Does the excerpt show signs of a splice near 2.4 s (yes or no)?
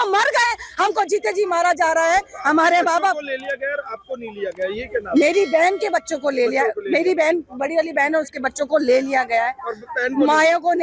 no